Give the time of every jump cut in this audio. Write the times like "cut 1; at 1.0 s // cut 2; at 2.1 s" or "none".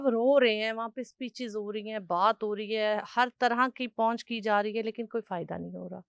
none